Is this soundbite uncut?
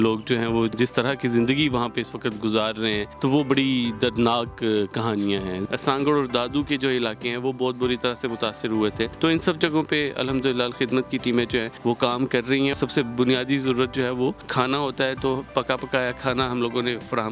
no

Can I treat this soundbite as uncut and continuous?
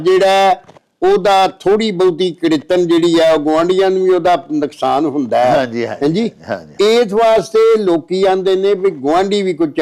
yes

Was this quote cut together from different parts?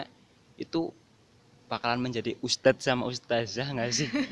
no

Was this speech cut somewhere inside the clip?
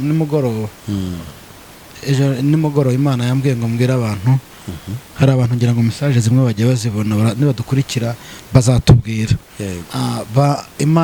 no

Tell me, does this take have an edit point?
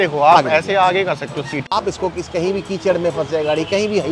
yes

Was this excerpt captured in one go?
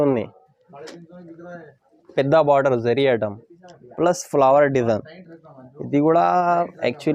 yes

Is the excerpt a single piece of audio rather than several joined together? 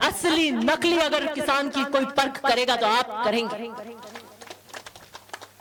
yes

